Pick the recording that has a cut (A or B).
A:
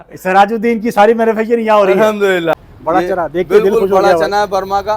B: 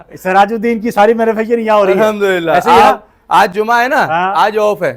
A